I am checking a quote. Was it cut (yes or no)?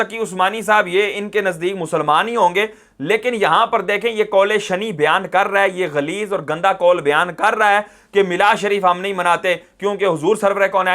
no